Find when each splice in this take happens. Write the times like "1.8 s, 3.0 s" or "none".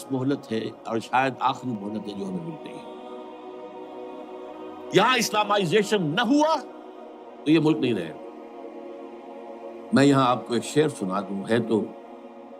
8.1 s, 9.9 s